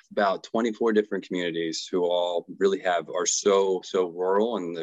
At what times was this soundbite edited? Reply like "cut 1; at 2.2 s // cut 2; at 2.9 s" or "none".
none